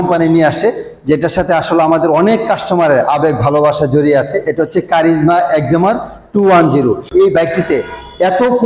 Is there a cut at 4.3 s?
no; 1 cut; at 7.0 s

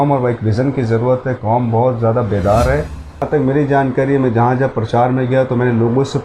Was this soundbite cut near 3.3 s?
yes; 1 cut; at 3.3 s

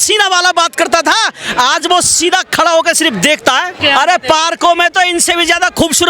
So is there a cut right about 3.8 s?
yes; 1 cut; at 3.8 s

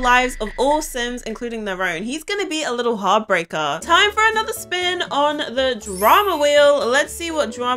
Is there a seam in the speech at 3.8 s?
yes; 1 cut; at 3.8 s

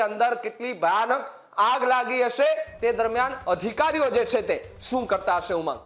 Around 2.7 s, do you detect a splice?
no; 0 cuts

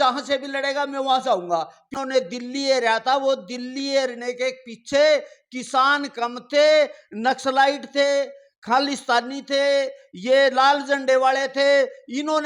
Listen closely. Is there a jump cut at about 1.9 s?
yes; 1 cut; at 1.9 s

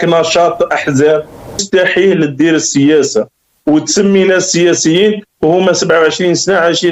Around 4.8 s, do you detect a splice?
no; 1 cut; at 1.6 s

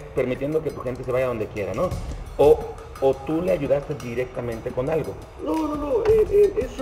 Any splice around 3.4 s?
no; 0 cuts

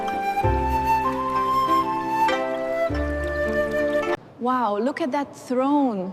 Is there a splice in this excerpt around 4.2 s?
yes; 1 cut; at 4.2 s

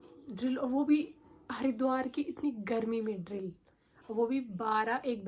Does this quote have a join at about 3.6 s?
no; 0 cuts

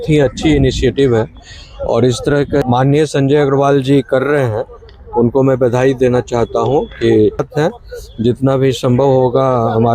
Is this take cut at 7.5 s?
yes; 2 cuts; at 2.6 s, 7.5 s

